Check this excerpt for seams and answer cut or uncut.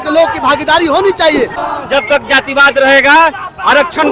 cut